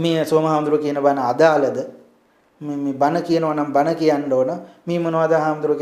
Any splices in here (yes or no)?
no